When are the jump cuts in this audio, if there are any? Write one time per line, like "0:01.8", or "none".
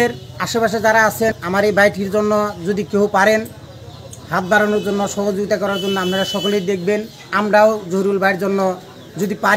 0:01.4